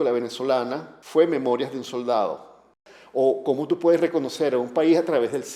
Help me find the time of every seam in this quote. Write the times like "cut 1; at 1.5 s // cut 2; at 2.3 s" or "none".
cut 1; at 2.8 s